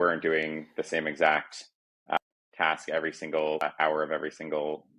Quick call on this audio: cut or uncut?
cut